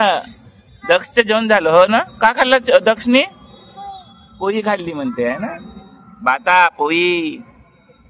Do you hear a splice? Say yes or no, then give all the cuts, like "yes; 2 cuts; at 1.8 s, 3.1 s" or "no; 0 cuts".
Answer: no; 0 cuts